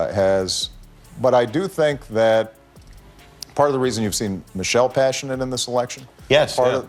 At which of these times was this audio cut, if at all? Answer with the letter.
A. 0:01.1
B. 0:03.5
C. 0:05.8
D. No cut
A